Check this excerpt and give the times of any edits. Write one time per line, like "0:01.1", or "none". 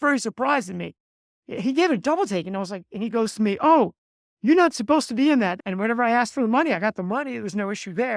0:05.5